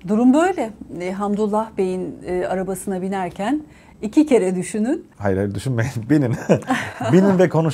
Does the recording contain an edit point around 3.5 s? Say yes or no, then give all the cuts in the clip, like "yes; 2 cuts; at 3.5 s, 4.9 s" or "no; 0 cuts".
no; 1 cut; at 5.1 s